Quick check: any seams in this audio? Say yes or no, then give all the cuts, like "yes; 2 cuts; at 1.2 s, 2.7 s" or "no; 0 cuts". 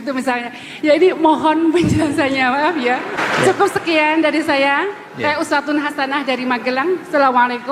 no; 0 cuts